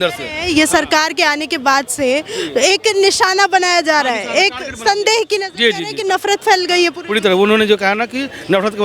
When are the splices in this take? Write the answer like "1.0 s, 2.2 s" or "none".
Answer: 5.9 s